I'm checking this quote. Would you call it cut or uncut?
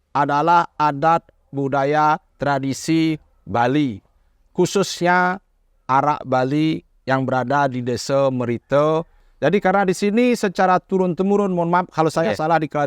cut